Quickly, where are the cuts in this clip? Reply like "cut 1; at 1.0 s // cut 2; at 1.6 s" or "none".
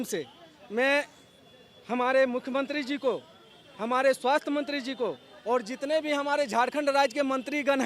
none